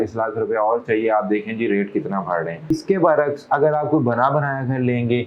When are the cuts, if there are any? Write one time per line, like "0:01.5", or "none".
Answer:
0:02.7